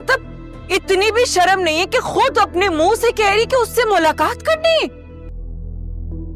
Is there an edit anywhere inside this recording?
yes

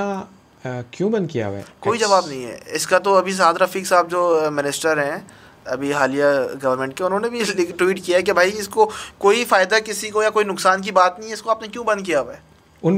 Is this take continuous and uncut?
yes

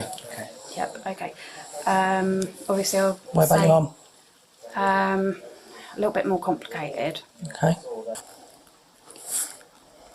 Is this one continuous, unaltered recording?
no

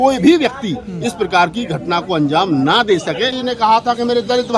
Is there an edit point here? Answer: yes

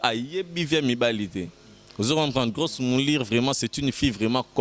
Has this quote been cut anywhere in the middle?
no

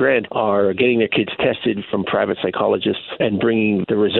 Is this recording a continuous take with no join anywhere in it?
no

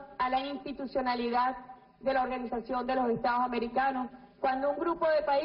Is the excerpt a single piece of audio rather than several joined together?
no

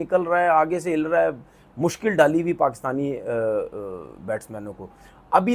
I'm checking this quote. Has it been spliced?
no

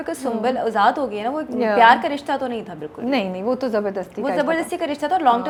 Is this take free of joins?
yes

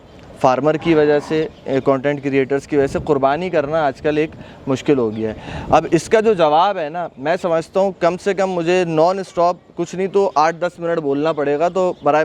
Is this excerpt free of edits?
yes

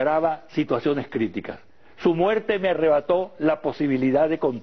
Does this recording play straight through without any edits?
no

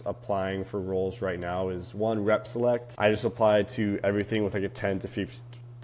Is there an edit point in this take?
yes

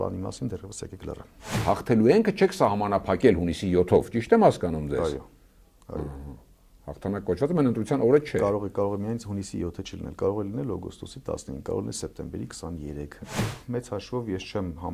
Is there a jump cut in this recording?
yes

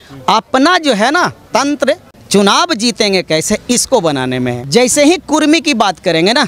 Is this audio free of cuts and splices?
no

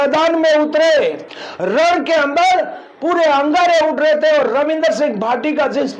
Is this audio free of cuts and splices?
no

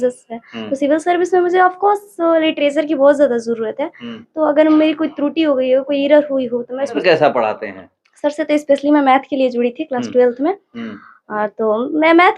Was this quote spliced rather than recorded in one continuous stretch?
yes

